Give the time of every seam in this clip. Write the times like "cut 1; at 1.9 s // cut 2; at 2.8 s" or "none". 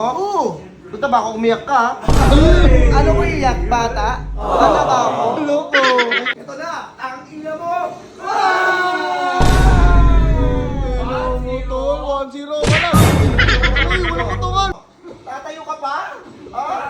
cut 1; at 6.3 s // cut 2; at 14.7 s